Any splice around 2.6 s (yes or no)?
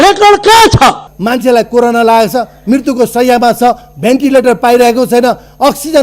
no